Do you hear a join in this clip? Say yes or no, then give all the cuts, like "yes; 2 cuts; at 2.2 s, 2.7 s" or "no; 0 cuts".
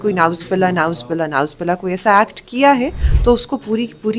no; 0 cuts